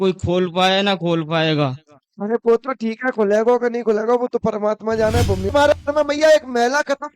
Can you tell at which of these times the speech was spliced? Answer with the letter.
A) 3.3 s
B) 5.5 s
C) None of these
B